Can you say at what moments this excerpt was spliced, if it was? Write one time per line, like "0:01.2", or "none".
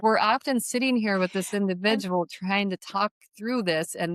none

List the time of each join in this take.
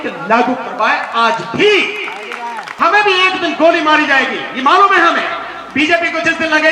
0:02.7

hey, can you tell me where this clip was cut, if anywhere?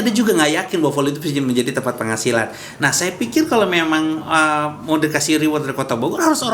0:02.6

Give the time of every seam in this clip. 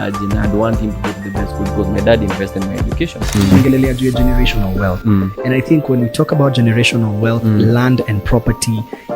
0:03.4

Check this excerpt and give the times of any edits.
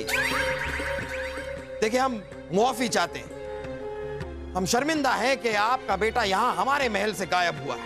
none

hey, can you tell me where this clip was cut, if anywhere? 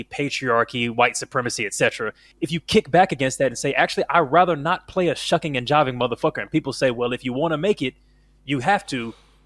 0:02.2

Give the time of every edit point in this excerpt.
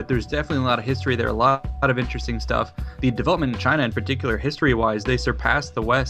0:01.9

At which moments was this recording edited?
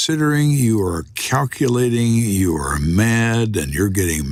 none

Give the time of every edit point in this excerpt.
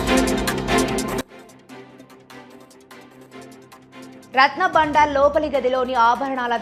none

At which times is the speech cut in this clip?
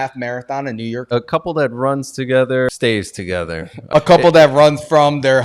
0:01.0
0:02.7
0:03.9

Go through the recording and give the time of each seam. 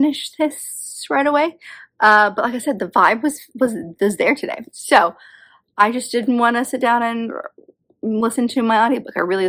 none

